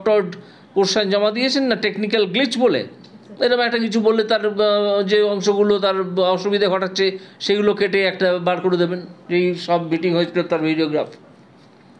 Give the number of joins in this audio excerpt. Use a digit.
0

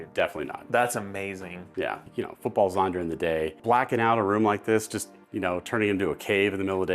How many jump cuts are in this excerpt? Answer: 2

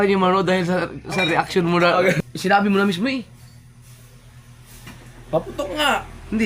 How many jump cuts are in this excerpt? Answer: 1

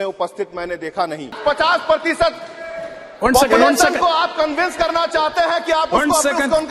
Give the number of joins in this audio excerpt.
1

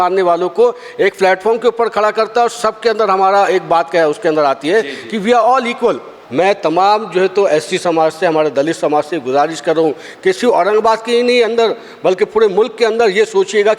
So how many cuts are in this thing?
1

